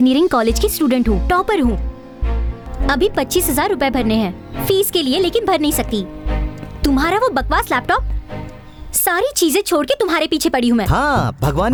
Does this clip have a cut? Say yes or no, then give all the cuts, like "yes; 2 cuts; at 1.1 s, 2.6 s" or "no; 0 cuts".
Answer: no; 0 cuts